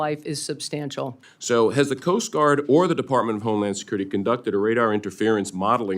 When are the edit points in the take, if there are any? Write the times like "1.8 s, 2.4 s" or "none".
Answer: 1.3 s